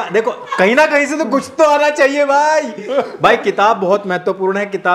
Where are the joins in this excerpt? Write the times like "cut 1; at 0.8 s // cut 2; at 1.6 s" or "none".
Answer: none

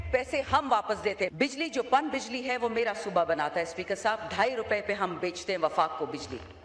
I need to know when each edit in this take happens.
cut 1; at 1.3 s

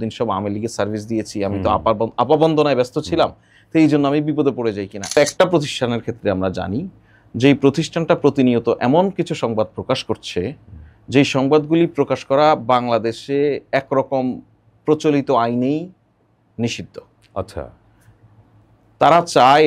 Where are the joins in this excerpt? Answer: cut 1; at 5.2 s

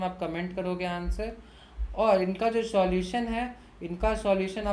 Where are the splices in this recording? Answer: none

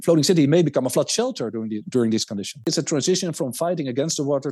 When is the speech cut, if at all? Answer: cut 1; at 2.7 s

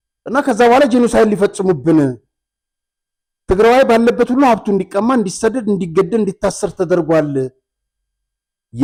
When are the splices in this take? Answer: none

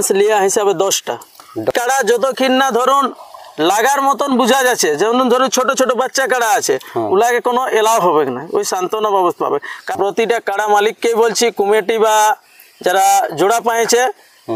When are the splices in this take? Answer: cut 1; at 1.7 s // cut 2; at 9.9 s

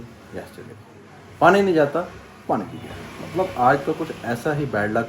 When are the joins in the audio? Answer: none

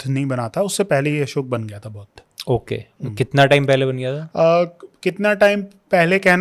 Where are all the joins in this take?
none

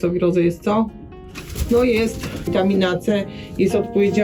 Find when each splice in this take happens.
cut 1; at 2.5 s

